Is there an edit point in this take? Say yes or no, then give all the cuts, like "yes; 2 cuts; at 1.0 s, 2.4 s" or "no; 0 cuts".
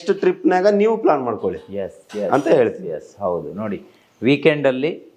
no; 0 cuts